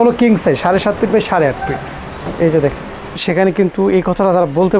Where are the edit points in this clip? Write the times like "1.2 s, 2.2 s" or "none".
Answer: 3.2 s